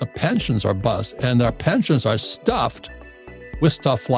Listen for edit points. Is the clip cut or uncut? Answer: uncut